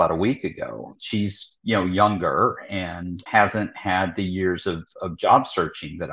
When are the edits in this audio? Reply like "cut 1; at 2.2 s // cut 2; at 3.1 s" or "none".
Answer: cut 1; at 0.9 s // cut 2; at 3.2 s